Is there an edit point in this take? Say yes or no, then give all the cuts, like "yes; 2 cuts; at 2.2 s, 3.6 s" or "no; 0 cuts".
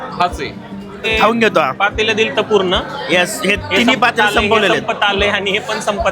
yes; 1 cut; at 1.1 s